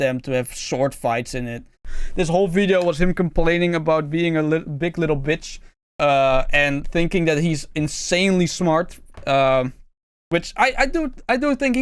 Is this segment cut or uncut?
cut